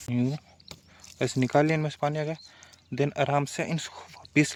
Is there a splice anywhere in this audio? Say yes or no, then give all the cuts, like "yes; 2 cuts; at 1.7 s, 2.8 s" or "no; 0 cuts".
no; 0 cuts